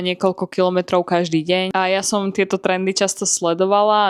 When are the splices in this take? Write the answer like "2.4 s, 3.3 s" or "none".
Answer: none